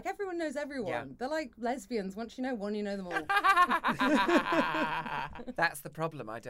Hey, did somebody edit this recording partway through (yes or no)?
yes